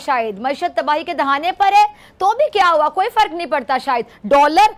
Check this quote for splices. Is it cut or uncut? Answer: uncut